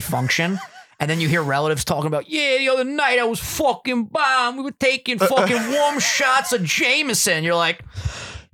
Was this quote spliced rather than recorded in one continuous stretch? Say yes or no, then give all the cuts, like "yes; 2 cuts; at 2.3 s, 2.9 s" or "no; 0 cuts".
no; 0 cuts